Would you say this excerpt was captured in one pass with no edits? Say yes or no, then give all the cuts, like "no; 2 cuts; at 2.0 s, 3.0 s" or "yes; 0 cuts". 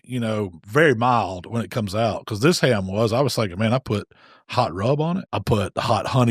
no; 1 cut; at 5.3 s